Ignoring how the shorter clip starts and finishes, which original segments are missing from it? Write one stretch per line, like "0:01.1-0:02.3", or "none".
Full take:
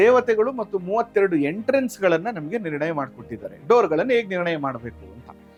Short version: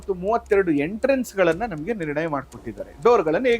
none